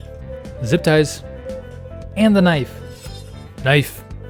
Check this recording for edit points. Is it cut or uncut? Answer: uncut